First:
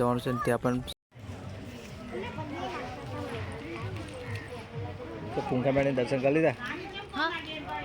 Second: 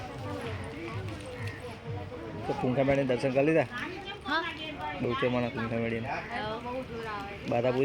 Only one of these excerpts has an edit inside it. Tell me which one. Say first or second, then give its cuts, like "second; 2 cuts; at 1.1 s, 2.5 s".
first; 1 cut; at 0.9 s